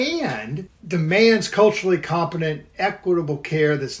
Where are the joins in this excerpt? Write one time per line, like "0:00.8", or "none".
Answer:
none